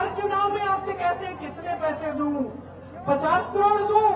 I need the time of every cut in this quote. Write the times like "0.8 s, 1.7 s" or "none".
none